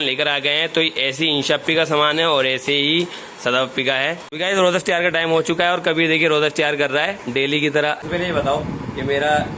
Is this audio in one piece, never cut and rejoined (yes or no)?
no